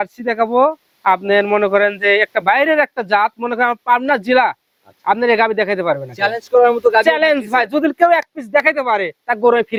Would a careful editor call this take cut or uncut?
uncut